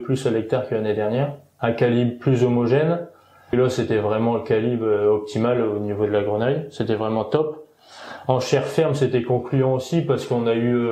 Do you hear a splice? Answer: yes; 1 cut; at 1.4 s

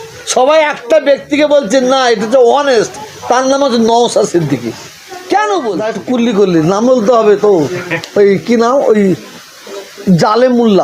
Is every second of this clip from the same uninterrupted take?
no; 1 cut; at 5.9 s

